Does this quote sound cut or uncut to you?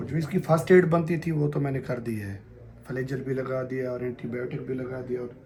uncut